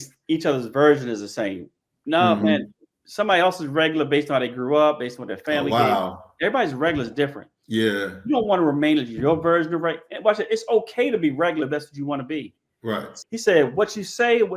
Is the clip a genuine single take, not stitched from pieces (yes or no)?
no